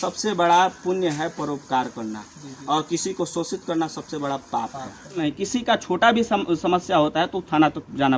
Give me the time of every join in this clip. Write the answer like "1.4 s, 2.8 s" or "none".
5.2 s